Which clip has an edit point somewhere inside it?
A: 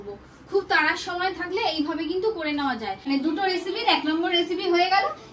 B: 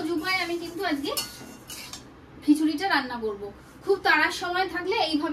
A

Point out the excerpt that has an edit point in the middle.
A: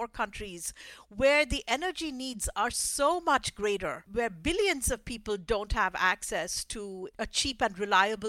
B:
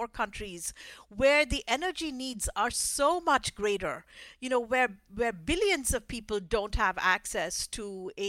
A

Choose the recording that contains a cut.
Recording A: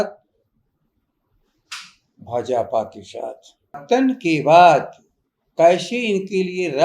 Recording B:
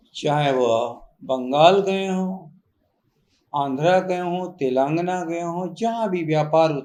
A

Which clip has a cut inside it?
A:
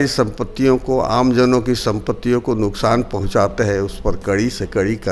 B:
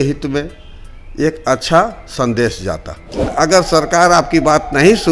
B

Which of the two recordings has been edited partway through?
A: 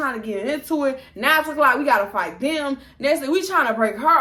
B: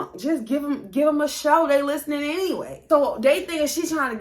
B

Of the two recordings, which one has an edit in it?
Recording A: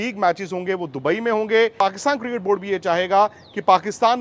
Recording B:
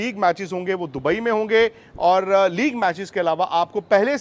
A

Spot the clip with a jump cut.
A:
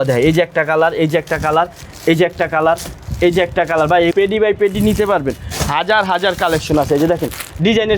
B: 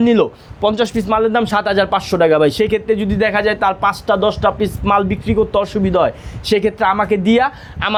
A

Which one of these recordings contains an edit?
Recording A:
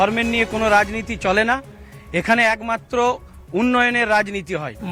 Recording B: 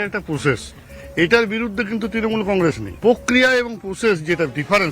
B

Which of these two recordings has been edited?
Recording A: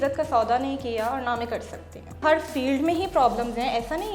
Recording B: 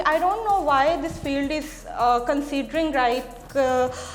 A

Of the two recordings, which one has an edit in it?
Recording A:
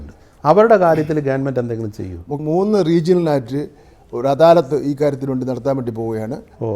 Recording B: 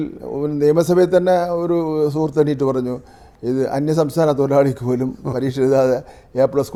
A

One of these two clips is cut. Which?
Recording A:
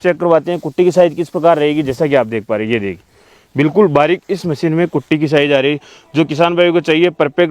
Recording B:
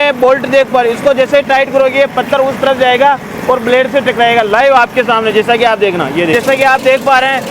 B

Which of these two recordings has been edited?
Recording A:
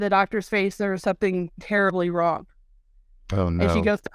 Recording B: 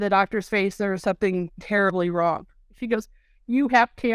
B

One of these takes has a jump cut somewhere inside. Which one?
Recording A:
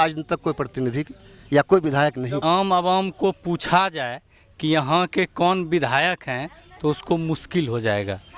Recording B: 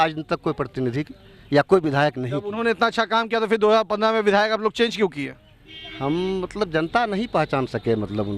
A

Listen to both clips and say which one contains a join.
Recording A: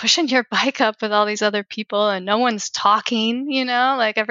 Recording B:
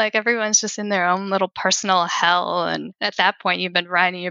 B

